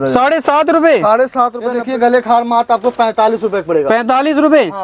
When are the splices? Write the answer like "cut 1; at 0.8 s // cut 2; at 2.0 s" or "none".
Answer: cut 1; at 1.8 s